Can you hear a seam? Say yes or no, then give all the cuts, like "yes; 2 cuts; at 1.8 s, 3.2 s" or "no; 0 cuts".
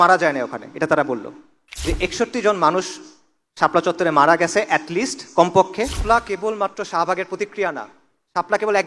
yes; 2 cuts; at 1.7 s, 6.0 s